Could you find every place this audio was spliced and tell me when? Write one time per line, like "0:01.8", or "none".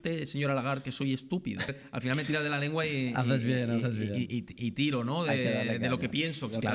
0:01.8

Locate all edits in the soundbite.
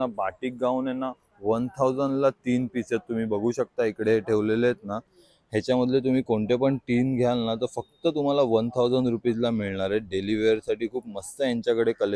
none

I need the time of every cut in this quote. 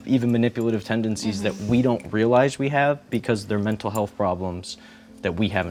none

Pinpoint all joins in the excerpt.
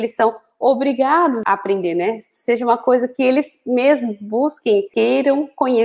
0:01.4
0:04.9

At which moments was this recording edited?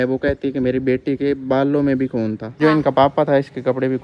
0:02.6

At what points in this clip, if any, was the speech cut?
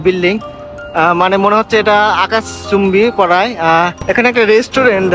0:04.0

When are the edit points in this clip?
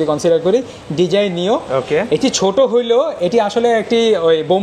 none

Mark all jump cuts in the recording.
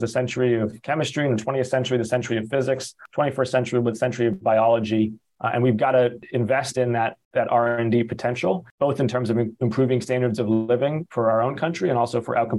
0:03.0
0:05.3
0:06.2
0:07.2
0:08.7

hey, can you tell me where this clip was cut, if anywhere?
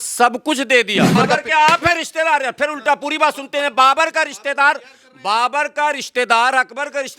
0:01.2

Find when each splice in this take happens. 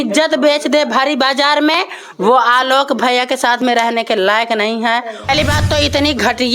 0:05.3

